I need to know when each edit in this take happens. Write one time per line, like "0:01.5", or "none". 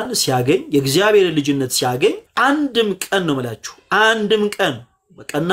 0:02.3